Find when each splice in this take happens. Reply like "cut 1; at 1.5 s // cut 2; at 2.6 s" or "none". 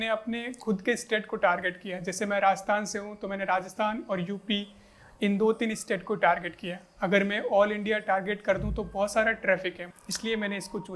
cut 1; at 9.9 s